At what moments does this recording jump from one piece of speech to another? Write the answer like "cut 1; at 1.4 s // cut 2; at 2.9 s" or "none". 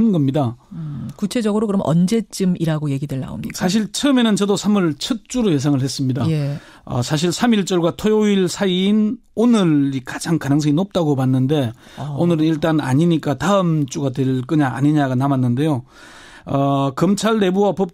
cut 1; at 5.5 s

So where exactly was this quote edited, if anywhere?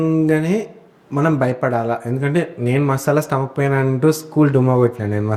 none

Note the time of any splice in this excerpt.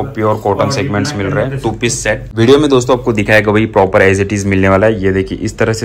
cut 1; at 2.3 s

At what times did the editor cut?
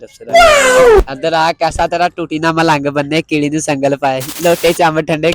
cut 1; at 1.0 s // cut 2; at 4.4 s

